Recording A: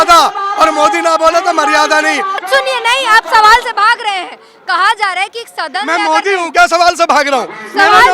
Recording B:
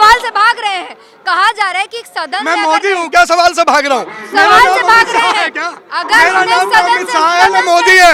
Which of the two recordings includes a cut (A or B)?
A